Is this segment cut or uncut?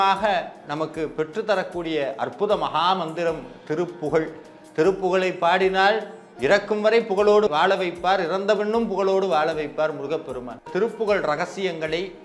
cut